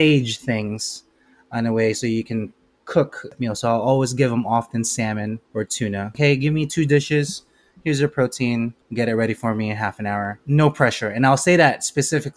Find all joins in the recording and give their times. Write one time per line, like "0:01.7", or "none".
0:03.3
0:06.0
0:08.8
0:10.4